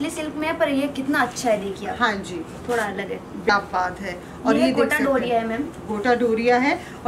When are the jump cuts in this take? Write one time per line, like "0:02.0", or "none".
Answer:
0:03.5